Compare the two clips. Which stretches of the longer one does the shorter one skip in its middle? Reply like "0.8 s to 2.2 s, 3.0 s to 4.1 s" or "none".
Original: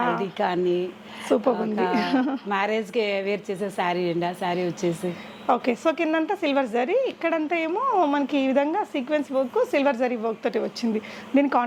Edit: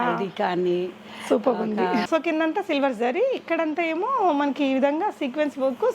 2.1 s to 5.8 s